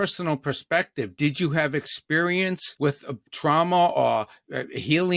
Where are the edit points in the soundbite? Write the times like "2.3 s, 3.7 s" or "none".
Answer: 3.1 s